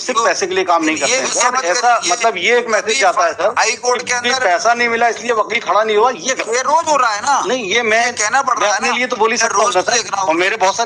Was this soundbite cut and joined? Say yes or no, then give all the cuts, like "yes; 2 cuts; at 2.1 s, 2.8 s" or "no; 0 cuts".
yes; 1 cut; at 1.1 s